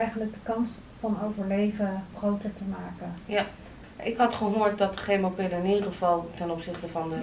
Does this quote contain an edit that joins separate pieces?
yes; 2 cuts; at 2.2 s, 3.7 s

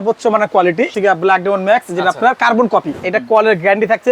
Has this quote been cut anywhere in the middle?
yes; 2 cuts; at 0.9 s, 3.0 s

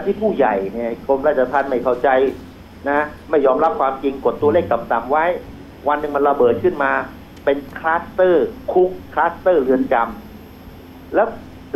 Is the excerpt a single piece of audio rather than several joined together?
yes; 0 cuts

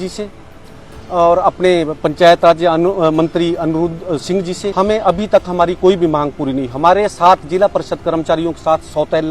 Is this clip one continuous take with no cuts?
no; 1 cut; at 4.6 s

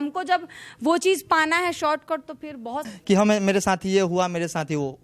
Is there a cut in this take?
yes; 1 cut; at 2.8 s

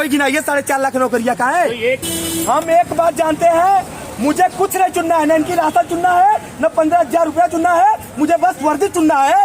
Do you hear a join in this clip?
yes; 1 cut; at 2.0 s

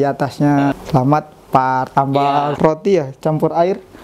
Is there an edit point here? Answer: yes; 2 cuts; at 0.7 s, 2.5 s

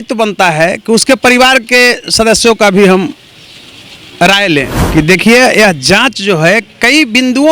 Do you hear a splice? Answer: yes; 1 cut; at 4.8 s

